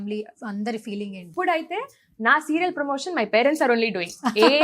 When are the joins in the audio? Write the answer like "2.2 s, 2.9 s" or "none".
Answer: 1.3 s

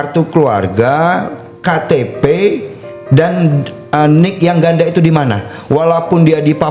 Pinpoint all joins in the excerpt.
none

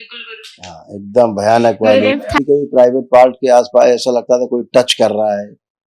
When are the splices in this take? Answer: 2.4 s

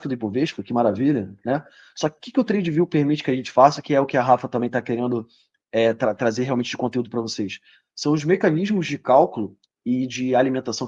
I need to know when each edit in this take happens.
none

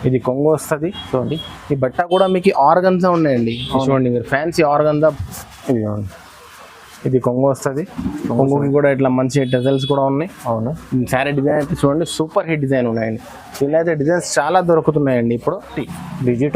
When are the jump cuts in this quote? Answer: 5.1 s, 15.7 s

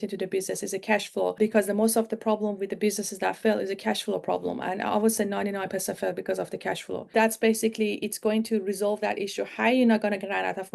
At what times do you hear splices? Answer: 1.4 s, 7.0 s

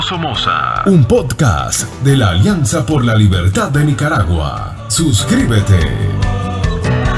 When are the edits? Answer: none

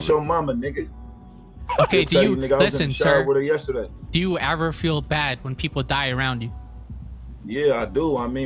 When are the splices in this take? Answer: none

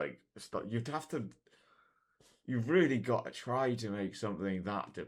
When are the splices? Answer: none

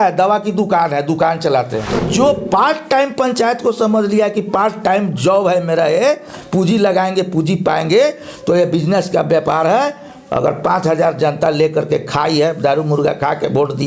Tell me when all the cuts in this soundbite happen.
2.0 s

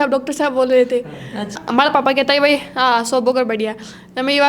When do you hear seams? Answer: 1.6 s

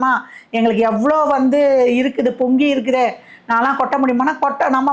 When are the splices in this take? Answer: none

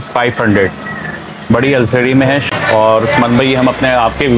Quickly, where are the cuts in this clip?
2.4 s

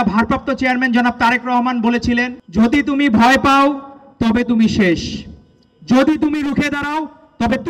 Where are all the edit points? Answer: 2.4 s

